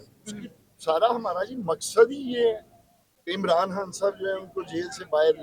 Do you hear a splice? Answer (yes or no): no